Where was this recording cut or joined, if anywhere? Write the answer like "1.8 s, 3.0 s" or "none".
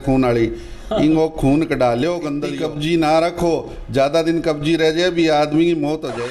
2.5 s